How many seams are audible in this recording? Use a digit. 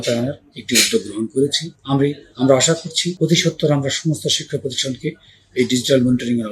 2